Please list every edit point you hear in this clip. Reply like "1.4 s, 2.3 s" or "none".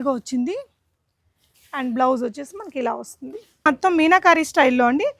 3.7 s